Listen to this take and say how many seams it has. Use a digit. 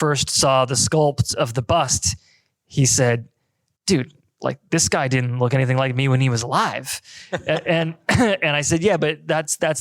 0